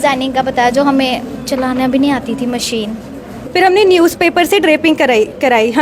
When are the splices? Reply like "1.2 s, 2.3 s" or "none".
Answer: 3.3 s